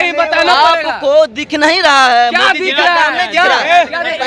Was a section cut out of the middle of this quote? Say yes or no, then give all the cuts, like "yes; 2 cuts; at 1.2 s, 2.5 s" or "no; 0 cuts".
no; 0 cuts